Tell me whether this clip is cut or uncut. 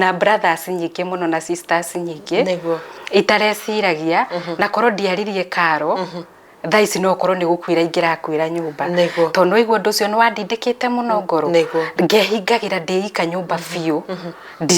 uncut